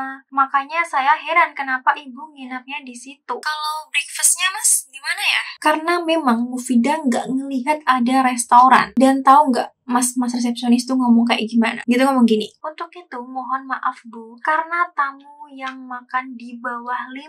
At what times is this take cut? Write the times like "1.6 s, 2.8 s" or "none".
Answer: 3.4 s

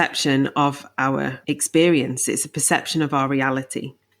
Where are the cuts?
1.4 s

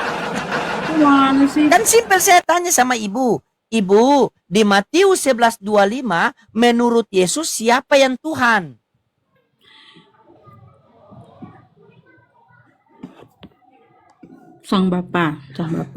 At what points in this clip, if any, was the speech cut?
1.7 s

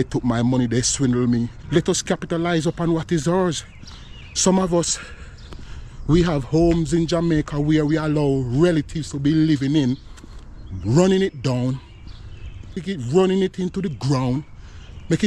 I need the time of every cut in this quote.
1.6 s, 12.8 s

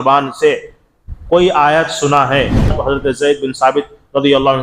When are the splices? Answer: 2.8 s

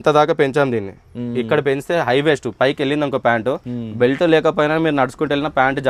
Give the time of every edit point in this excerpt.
none

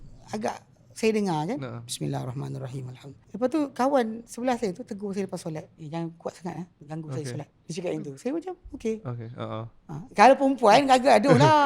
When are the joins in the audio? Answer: 3.2 s, 5.8 s, 6.8 s, 7.6 s

